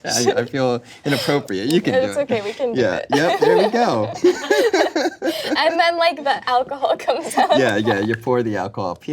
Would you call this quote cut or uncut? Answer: cut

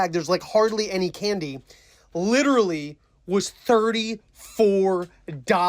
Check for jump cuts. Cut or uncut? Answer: uncut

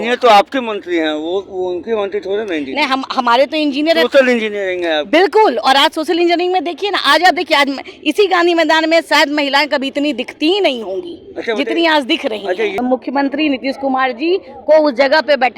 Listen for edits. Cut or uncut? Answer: cut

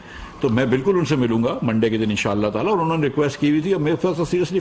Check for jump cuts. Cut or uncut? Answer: uncut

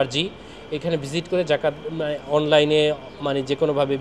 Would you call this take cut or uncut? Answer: uncut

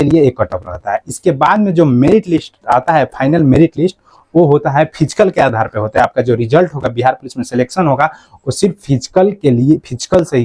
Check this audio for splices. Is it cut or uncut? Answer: uncut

